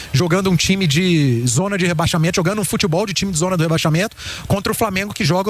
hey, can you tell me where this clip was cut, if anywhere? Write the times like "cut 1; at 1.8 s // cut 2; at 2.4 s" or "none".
none

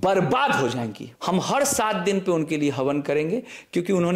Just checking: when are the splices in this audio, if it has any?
cut 1; at 1.1 s

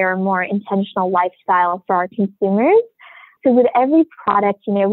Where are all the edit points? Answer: cut 1; at 3.3 s

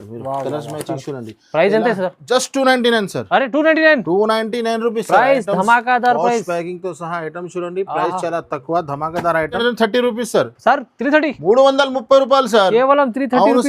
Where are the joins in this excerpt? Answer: cut 1; at 9.6 s

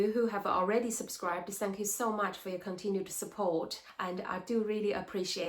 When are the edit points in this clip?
cut 1; at 3.8 s

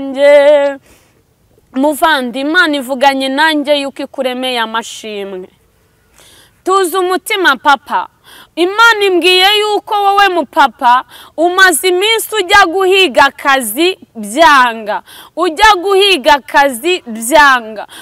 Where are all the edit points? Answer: none

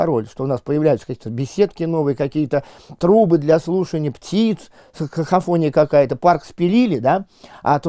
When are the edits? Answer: none

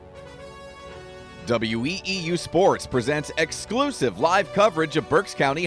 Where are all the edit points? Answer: cut 1; at 1.4 s

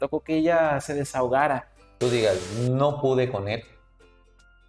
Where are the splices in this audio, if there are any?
cut 1; at 2.0 s

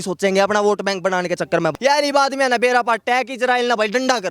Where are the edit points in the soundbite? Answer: cut 1; at 1.7 s

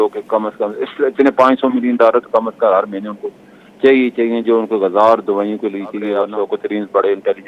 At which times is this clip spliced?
cut 1; at 6.2 s

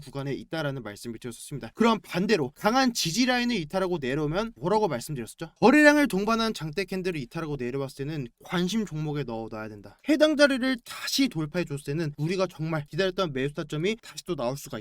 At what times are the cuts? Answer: cut 1; at 1.7 s // cut 2; at 8.4 s // cut 3; at 10.0 s

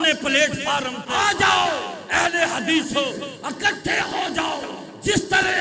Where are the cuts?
cut 1; at 1.0 s

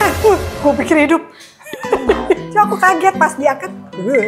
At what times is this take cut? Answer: cut 1; at 2.5 s

